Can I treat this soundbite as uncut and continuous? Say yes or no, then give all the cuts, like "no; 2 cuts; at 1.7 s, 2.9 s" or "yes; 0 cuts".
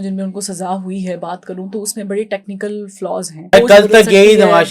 no; 1 cut; at 3.5 s